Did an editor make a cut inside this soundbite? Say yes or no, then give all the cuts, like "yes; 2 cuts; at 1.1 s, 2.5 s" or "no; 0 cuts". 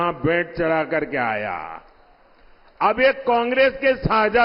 no; 0 cuts